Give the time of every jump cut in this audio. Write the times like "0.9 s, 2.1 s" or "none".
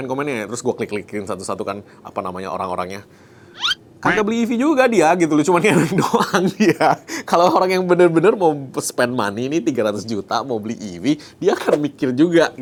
none